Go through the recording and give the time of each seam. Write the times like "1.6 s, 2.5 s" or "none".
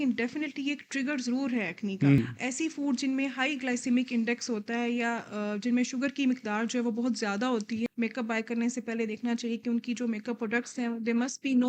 2.2 s, 7.9 s